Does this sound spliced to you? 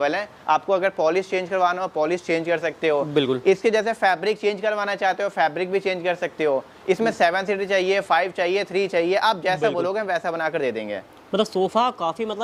no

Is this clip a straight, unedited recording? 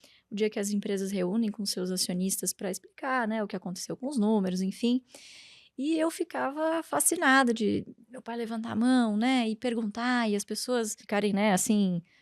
no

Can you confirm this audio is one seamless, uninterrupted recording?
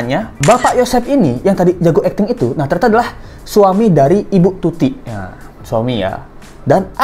yes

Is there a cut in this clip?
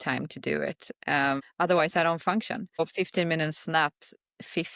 yes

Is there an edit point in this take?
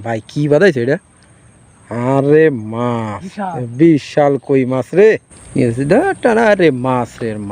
yes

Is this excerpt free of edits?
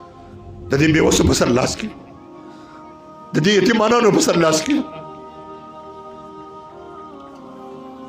no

